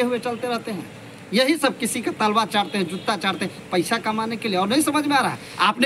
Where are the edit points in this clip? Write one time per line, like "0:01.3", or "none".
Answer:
none

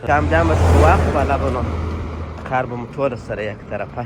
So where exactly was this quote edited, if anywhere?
none

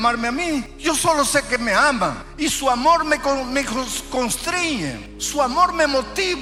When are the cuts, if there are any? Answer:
none

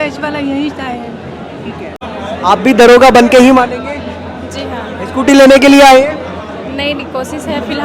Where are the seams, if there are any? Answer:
0:02.0

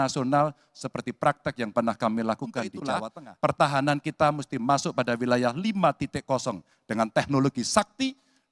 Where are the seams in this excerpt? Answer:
0:02.7

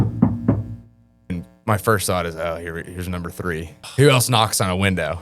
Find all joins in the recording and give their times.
0:01.3
0:03.8

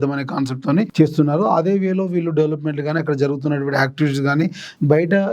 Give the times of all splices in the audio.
0:00.9

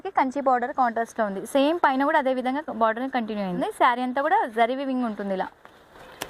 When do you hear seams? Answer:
0:03.6

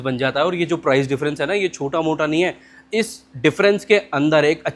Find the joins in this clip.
none

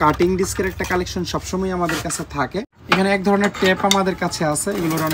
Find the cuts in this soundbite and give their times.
0:02.8

